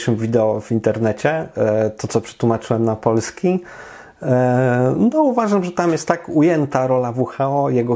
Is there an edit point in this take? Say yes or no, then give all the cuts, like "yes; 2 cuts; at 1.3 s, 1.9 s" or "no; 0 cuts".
no; 0 cuts